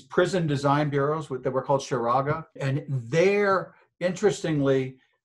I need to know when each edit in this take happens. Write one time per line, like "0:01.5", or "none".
0:02.6